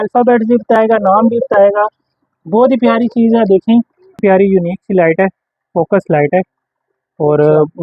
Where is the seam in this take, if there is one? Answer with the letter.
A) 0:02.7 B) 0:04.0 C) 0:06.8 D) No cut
B